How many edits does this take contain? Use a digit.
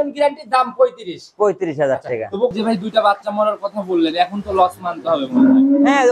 1